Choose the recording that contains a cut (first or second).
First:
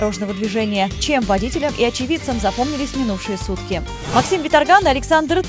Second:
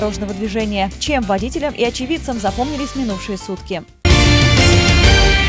second